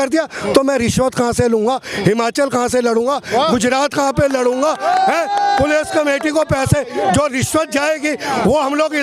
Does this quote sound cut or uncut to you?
uncut